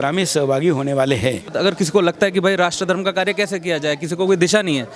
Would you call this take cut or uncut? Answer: cut